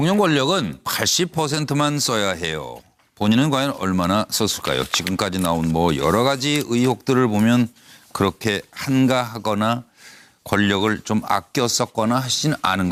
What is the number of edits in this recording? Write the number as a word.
zero